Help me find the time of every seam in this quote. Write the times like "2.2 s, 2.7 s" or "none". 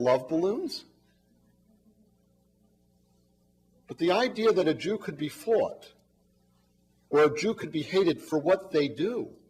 6.2 s